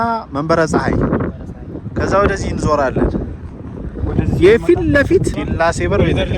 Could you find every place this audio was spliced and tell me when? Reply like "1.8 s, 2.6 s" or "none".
none